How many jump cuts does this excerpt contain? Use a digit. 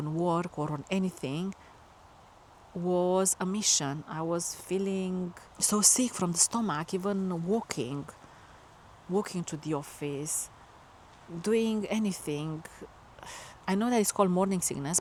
0